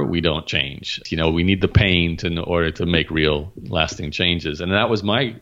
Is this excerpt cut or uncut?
cut